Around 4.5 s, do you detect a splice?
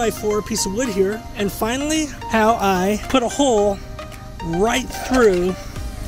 no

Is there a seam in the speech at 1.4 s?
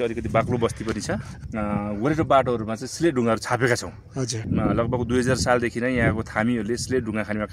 yes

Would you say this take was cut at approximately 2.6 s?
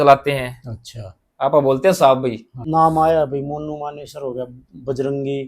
yes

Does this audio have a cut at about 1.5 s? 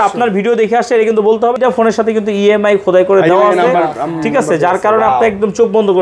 yes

